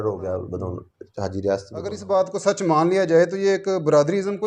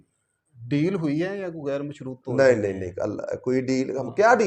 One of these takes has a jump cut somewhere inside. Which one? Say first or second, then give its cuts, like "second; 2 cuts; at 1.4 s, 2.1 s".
first; 1 cut; at 2.0 s